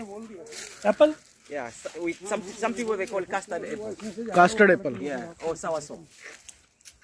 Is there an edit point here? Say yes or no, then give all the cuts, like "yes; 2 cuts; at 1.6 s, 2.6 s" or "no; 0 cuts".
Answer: no; 0 cuts